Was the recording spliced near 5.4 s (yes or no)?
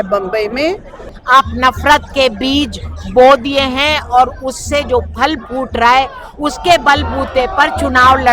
no